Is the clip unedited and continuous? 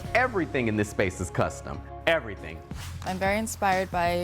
no; 1 cut; at 2.7 s

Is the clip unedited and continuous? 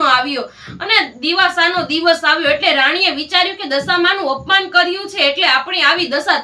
yes; 0 cuts

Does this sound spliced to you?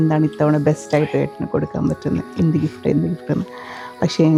no; 0 cuts

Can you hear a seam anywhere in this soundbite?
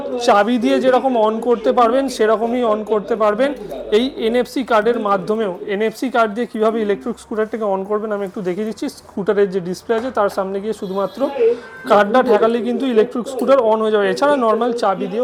no; 0 cuts

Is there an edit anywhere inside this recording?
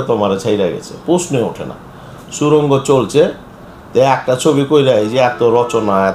no; 0 cuts

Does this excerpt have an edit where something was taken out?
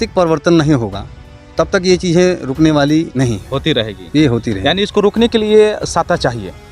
no; 0 cuts

